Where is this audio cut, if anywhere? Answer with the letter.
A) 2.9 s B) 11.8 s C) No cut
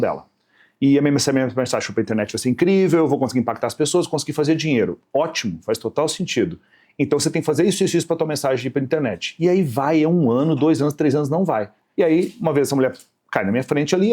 B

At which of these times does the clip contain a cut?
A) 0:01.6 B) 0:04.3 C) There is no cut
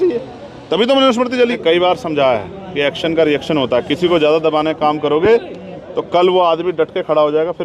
A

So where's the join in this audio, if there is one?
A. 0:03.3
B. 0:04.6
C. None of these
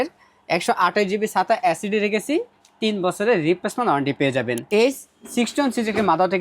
B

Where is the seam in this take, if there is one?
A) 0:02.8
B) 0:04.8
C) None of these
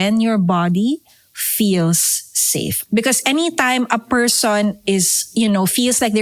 A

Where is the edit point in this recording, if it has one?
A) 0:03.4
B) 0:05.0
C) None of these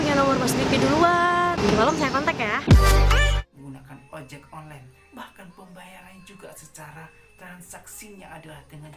A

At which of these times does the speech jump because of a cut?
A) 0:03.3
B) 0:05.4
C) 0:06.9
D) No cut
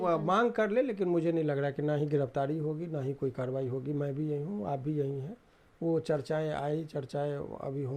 D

